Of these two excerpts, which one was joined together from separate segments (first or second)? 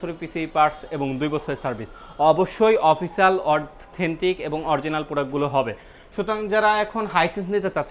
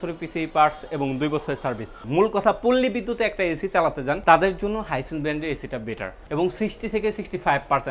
second